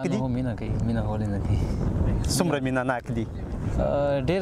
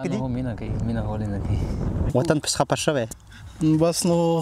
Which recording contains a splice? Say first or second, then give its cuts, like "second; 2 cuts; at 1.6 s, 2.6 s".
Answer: second; 1 cut; at 2.1 s